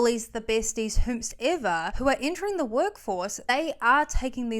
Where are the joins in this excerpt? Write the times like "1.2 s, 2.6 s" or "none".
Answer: 1.9 s, 3.5 s

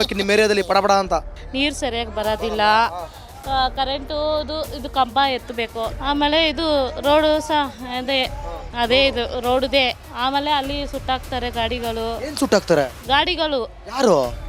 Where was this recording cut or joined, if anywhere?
1.4 s, 5.9 s, 10.0 s

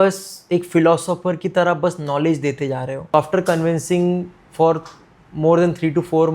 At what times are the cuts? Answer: 3.1 s

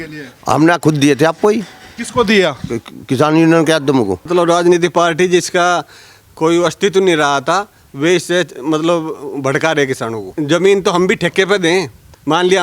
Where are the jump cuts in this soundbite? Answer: 4.3 s, 10.3 s

